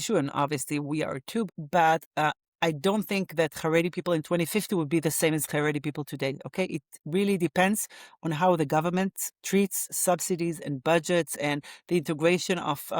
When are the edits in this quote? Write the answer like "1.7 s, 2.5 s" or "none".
1.5 s